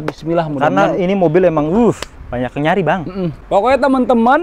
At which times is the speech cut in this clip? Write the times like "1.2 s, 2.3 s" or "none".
3.4 s

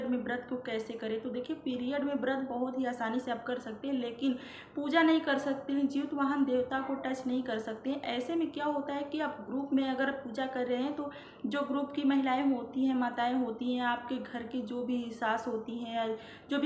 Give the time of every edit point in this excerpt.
none

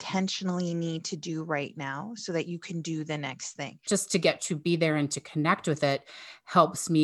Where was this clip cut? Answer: 3.8 s

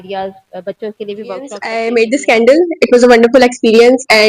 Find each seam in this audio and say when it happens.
1.7 s

